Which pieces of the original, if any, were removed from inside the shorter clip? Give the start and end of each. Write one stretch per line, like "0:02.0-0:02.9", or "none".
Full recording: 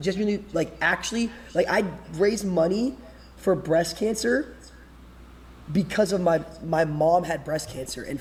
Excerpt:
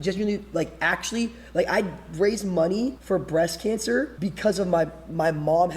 0:03.0-0:03.4
0:04.5-0:05.7